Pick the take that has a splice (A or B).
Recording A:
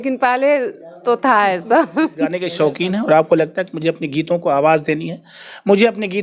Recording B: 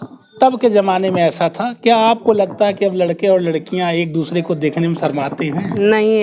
A